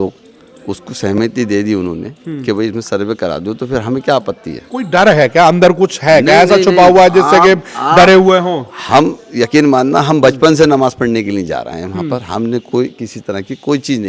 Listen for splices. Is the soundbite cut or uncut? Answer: uncut